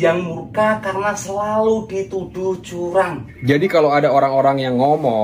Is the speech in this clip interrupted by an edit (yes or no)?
yes